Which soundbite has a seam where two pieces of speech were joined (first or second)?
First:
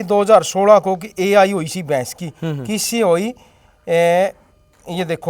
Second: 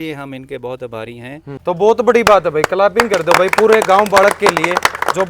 second